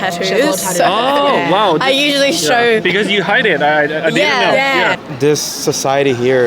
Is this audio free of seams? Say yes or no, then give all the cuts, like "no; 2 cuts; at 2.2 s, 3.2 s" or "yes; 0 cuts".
no; 1 cut; at 5.0 s